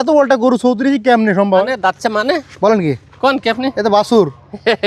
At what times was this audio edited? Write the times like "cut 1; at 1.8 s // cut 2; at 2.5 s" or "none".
cut 1; at 1.5 s